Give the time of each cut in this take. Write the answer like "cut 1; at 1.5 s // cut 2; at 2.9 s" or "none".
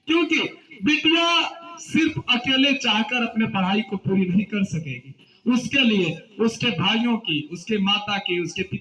none